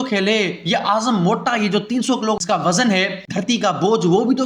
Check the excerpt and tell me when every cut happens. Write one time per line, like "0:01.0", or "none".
0:02.4
0:03.2